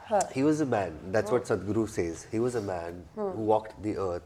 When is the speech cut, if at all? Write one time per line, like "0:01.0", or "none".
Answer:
none